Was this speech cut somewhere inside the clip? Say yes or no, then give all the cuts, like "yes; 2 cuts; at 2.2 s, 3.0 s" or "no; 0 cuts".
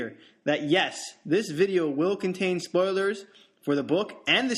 yes; 1 cut; at 1.4 s